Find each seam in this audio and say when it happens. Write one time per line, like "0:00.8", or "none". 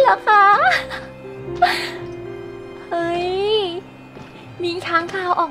none

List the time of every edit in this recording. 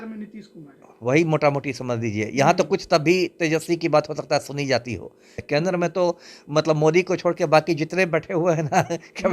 0:05.4

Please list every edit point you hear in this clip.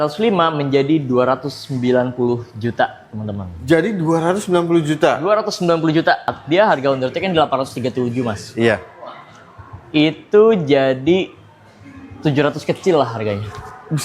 0:06.4

